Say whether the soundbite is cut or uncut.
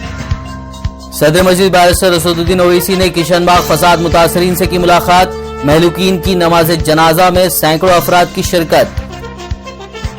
cut